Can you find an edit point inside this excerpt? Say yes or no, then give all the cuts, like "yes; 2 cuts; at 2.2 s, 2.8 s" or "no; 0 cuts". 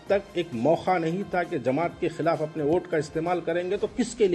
no; 0 cuts